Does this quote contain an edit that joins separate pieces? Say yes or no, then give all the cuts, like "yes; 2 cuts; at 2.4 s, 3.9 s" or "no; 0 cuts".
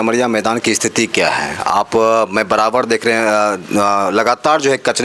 no; 0 cuts